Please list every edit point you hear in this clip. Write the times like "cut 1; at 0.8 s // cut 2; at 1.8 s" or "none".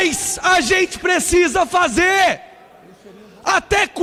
none